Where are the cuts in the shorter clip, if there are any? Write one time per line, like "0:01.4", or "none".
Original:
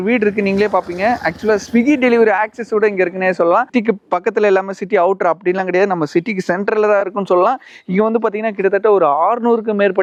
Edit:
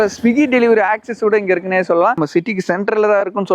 0:02.2